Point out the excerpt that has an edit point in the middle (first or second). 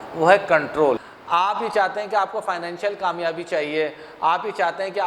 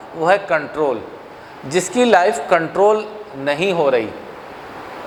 first